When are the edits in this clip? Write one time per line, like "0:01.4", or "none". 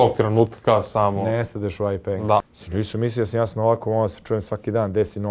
0:02.4